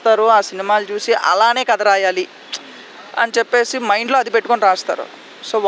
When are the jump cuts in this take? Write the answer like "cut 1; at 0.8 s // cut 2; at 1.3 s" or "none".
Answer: none